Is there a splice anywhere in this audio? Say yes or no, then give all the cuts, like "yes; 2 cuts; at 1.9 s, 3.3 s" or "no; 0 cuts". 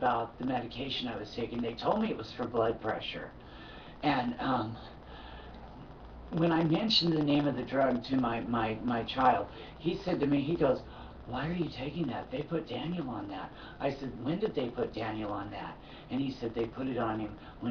no; 0 cuts